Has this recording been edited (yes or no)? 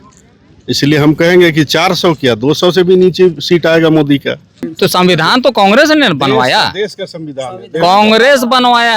yes